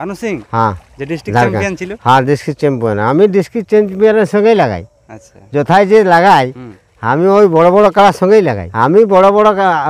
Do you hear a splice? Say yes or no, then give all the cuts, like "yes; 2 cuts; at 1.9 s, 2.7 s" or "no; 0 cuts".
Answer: yes; 1 cut; at 8.6 s